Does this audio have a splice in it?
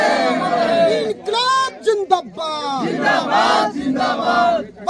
no; 0 cuts

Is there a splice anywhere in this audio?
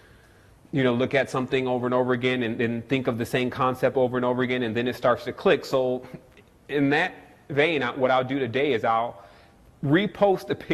no; 0 cuts

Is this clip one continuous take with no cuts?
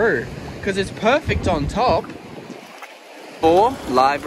no; 1 cut; at 3.4 s

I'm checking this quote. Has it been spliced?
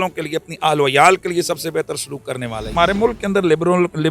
yes; 1 cut; at 2.7 s

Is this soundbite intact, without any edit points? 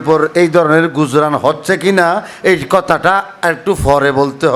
yes; 0 cuts

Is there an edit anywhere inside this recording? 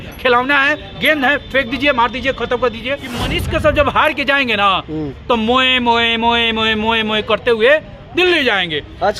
yes; 1 cut; at 3.4 s

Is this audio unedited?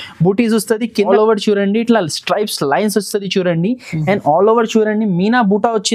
no; 1 cut; at 1.0 s

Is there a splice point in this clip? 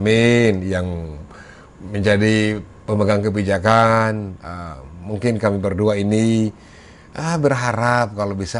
no; 0 cuts

